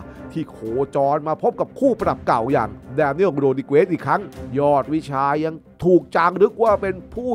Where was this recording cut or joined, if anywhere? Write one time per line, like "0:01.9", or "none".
0:04.3

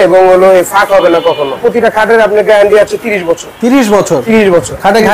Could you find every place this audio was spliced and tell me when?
0:01.6

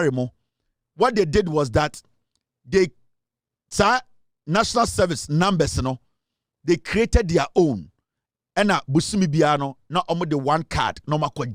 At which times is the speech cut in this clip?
none

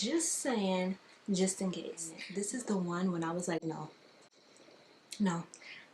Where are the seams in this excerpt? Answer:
0:02.2

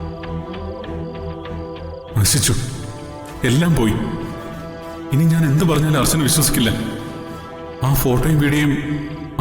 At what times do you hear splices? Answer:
0:02.1

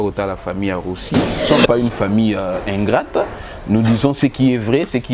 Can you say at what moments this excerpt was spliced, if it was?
0:01.4

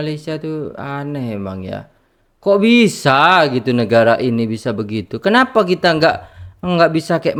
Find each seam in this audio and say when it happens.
none

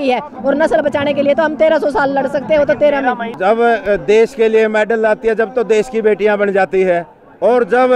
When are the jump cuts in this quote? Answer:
0:03.3

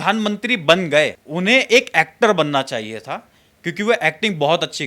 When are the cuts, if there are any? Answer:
0:01.2

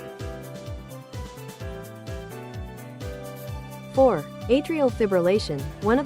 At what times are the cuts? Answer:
0:03.9

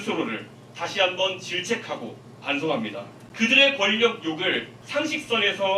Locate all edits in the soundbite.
0:03.2
0:04.8

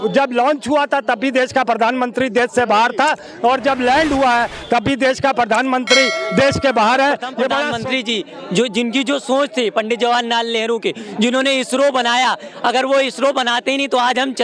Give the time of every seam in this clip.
0:07.7

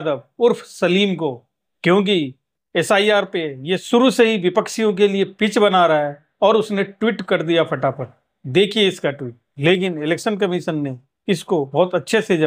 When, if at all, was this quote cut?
none

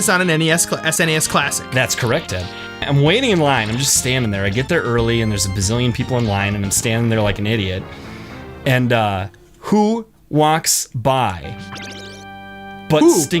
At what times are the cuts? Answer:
0:02.8

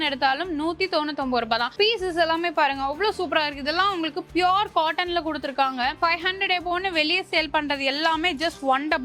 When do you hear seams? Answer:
0:01.7
0:06.0

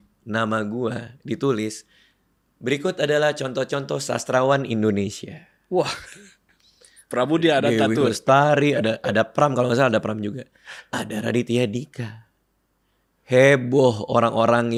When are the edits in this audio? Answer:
none

